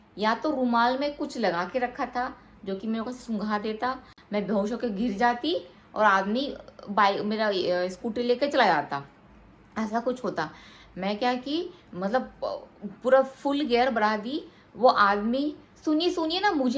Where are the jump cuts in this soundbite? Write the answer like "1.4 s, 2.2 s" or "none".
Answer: none